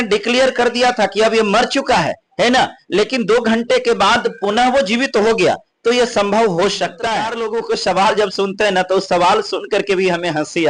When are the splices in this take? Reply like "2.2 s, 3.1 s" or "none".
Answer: 7.4 s